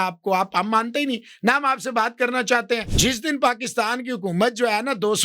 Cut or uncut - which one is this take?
cut